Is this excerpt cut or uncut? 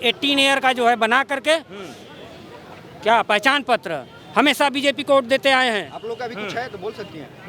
uncut